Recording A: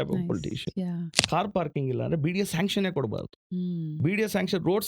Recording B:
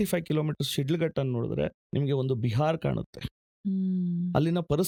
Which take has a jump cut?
A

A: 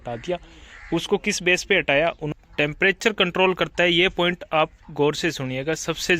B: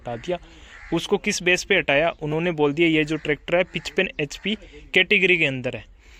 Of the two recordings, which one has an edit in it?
A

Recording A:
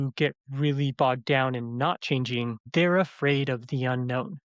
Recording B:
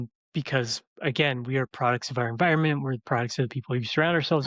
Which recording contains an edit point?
A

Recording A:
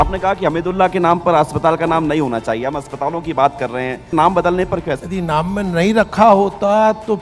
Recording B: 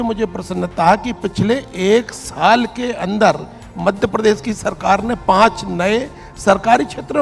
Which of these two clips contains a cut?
A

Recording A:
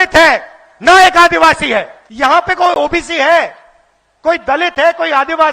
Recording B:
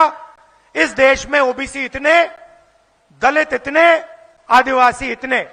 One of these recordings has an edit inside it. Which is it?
A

